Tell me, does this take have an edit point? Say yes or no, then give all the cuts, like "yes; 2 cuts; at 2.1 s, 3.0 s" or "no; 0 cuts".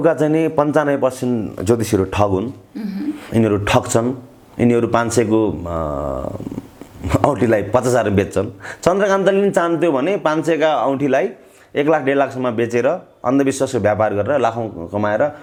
no; 0 cuts